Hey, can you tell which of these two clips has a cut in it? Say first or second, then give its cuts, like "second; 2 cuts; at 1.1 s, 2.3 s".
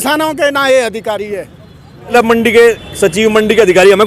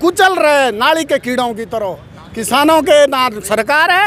first; 1 cut; at 2.1 s